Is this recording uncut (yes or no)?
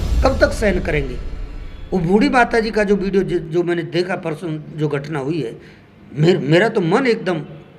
yes